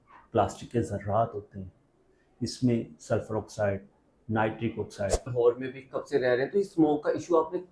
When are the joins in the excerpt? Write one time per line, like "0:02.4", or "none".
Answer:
0:05.2